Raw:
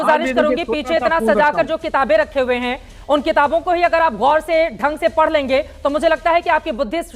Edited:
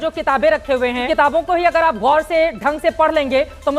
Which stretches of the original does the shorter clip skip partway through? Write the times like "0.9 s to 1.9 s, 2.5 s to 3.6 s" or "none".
2.7 s to 3.3 s